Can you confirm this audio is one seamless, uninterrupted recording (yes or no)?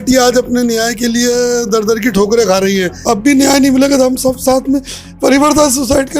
no